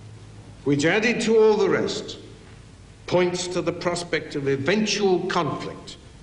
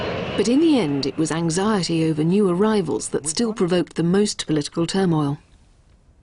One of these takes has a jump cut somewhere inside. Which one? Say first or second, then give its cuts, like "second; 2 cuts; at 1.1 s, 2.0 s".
first; 1 cut; at 2.6 s